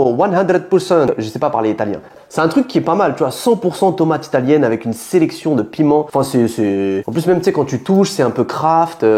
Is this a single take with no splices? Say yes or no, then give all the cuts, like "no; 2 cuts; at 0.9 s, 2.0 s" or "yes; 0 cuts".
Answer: yes; 0 cuts